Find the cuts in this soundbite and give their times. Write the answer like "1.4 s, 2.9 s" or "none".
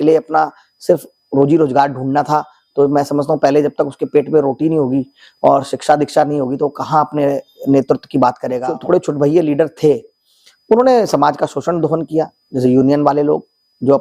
8.6 s